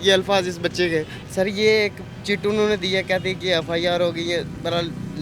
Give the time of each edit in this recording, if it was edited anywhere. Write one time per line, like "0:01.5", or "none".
0:01.2